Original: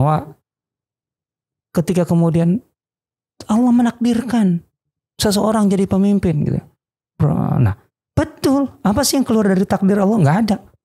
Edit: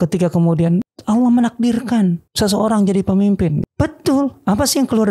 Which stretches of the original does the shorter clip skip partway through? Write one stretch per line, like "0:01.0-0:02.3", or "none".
0:02.7-0:03.4
0:04.7-0:05.1
0:06.5-0:08.0